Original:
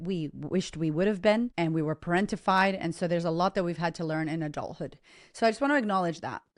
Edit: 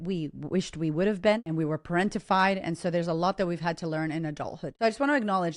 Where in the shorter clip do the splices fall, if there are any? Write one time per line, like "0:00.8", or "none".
0:01.5
0:04.7